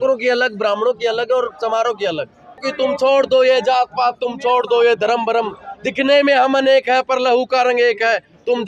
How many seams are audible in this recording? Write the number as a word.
one